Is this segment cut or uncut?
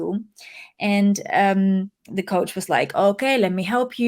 cut